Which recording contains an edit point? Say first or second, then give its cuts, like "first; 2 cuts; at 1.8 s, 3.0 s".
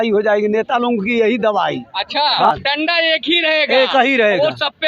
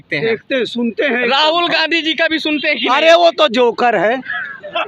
first; 1 cut; at 2.5 s